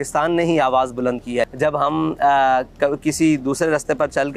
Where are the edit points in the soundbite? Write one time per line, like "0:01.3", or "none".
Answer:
0:01.5